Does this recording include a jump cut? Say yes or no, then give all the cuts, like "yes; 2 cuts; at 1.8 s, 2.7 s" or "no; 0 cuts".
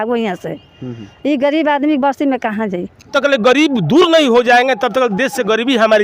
yes; 1 cut; at 3.1 s